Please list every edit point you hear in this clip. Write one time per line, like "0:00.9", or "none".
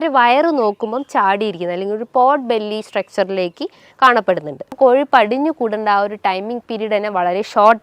0:04.8